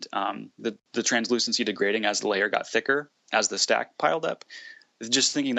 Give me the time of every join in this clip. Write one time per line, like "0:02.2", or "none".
none